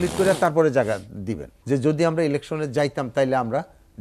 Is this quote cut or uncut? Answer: cut